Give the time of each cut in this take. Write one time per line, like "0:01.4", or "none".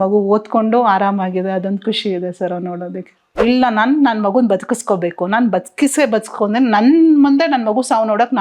0:03.4